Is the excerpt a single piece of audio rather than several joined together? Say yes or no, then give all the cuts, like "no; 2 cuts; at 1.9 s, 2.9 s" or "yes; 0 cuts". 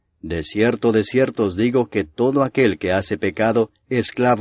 yes; 0 cuts